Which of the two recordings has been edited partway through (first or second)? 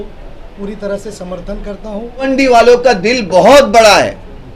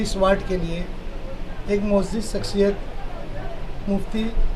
first